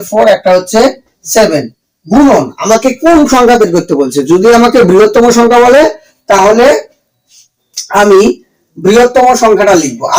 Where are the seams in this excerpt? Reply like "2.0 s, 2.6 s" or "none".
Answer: none